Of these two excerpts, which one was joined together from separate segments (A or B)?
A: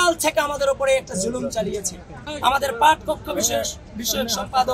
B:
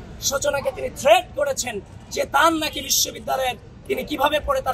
A